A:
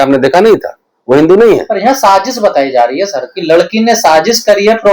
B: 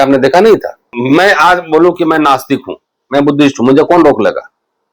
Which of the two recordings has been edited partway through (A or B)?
B